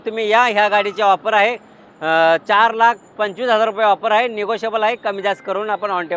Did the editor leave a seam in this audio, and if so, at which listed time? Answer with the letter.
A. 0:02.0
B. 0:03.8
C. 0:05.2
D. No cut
D